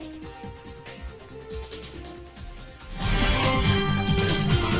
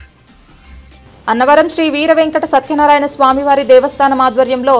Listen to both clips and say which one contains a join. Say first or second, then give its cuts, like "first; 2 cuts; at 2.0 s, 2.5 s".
second; 1 cut; at 1.0 s